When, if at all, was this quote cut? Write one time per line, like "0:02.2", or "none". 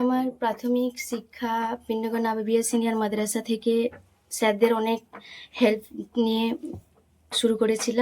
none